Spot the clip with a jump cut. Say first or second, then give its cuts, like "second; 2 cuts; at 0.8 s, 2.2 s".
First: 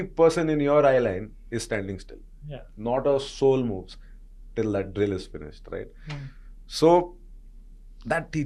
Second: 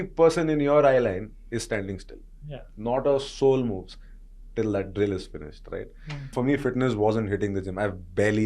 second; 1 cut; at 6.3 s